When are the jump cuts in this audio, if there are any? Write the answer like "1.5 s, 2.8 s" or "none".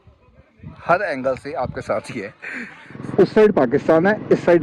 3.0 s